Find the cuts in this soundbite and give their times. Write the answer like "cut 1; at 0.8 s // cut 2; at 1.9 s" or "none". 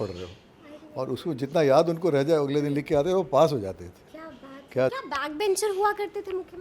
cut 1; at 4.9 s